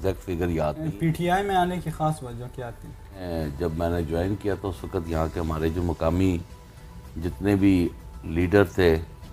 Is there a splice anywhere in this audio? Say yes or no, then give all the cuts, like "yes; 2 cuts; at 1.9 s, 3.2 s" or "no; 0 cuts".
yes; 2 cuts; at 0.9 s, 3.3 s